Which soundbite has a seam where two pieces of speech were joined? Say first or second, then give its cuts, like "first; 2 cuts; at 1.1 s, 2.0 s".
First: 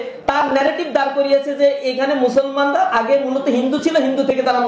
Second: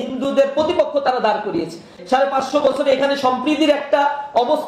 second; 1 cut; at 1.9 s